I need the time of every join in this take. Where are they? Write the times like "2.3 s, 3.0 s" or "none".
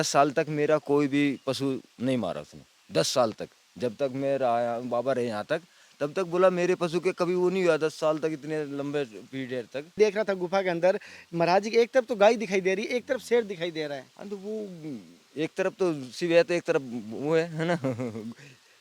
9.9 s